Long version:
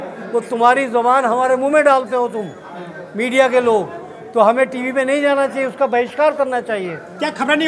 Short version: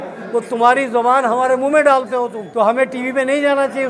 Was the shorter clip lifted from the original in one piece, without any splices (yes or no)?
no